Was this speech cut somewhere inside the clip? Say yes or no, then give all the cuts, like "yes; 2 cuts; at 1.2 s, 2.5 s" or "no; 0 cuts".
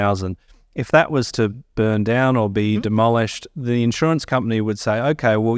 no; 0 cuts